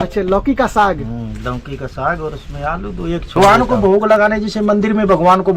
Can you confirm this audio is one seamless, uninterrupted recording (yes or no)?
no